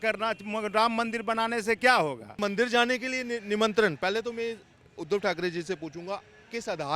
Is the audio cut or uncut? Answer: cut